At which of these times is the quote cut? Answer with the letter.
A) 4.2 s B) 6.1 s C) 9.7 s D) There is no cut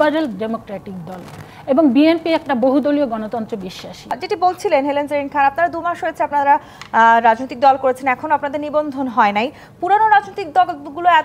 A